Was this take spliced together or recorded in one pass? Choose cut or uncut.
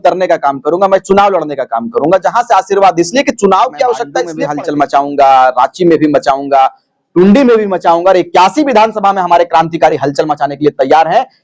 cut